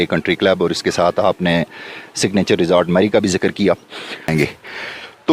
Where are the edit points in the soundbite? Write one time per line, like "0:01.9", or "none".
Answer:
0:04.3